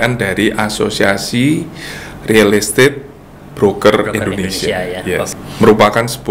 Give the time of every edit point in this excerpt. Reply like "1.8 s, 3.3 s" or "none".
5.4 s